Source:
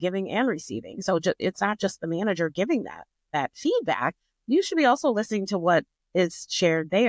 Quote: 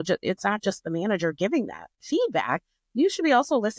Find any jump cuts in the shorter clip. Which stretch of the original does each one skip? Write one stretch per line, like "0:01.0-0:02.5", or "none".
0:03.2-0:03.5